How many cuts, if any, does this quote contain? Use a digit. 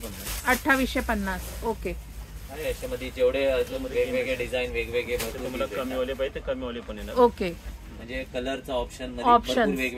0